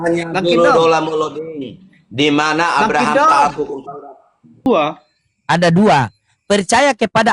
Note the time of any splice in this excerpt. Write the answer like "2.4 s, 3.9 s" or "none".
4.7 s